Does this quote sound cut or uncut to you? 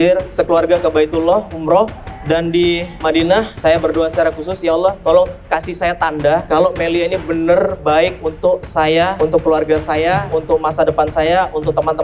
uncut